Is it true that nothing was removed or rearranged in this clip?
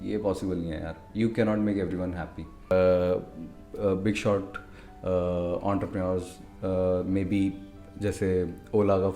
no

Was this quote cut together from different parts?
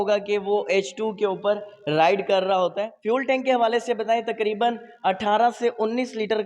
yes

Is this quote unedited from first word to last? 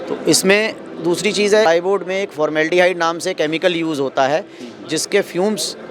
no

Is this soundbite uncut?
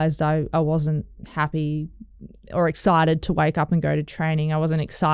yes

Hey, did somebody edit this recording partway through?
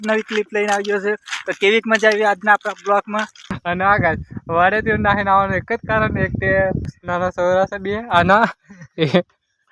yes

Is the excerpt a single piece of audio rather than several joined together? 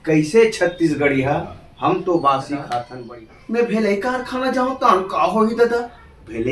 no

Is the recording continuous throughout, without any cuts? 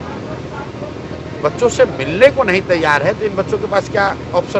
yes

